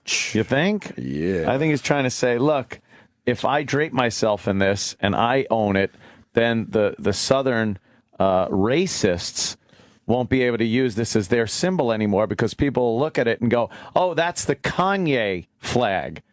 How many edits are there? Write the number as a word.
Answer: one